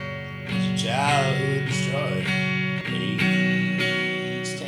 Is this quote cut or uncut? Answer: cut